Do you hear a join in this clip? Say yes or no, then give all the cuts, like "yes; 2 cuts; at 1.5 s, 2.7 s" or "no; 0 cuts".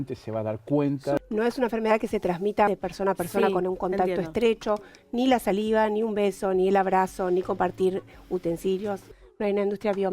yes; 3 cuts; at 1.2 s, 2.7 s, 9.1 s